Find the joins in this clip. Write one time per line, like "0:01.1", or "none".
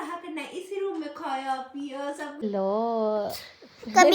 0:02.4